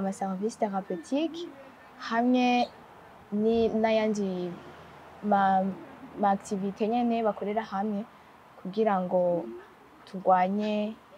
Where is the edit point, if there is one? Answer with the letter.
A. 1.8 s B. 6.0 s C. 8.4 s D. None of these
D